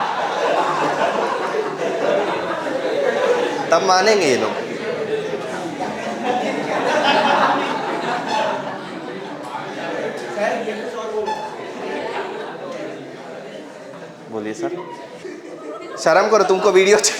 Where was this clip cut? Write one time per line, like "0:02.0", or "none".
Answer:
0:15.2